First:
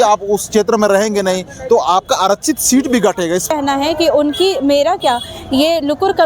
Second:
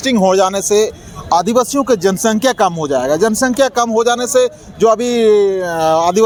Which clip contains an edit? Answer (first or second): first